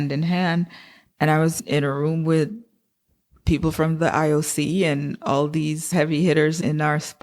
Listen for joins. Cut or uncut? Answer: cut